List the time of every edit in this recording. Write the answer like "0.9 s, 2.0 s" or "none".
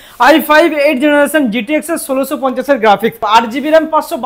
3.2 s